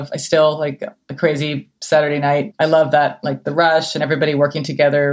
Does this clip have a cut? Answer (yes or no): yes